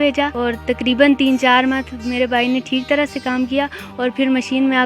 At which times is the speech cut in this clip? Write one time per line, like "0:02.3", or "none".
none